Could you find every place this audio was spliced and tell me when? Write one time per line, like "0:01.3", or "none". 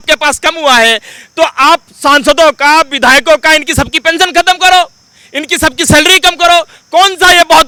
none